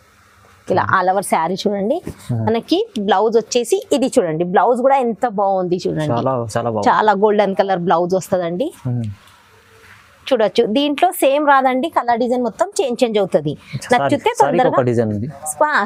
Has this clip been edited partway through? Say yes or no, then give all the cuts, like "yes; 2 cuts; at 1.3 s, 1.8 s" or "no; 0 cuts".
no; 0 cuts